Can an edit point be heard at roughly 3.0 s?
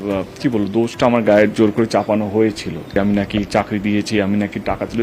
yes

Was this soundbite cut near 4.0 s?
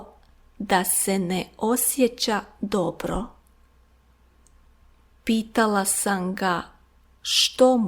yes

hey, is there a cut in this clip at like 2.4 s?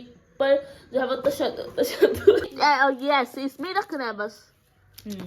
yes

